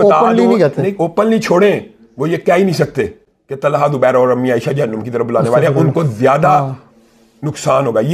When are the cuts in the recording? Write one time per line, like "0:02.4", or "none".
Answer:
none